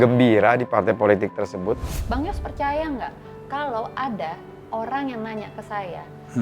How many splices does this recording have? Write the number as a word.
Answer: one